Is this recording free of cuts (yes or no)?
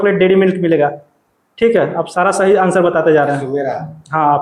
yes